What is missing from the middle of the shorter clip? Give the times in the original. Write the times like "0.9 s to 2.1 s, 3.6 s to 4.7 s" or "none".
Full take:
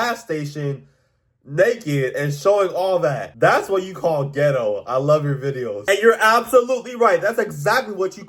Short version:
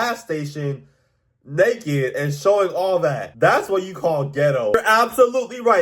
4.7 s to 6.1 s